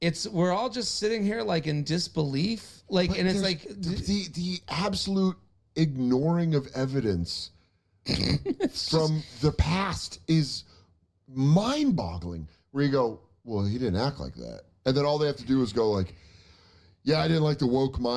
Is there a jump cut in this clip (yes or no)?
yes